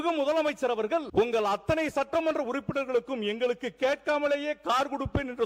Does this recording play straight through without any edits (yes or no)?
no